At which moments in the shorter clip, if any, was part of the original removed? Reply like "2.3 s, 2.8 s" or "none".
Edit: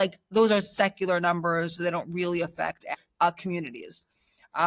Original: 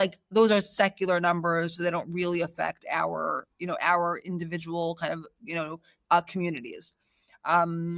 2.9 s